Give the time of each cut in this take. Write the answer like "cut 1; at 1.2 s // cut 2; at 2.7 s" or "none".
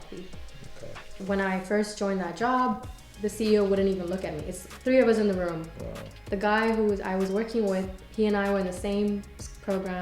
cut 1; at 1.1 s